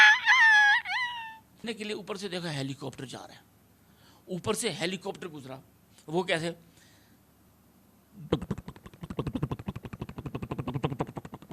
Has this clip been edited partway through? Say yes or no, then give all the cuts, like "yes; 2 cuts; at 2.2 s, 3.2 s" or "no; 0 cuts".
yes; 1 cut; at 1.6 s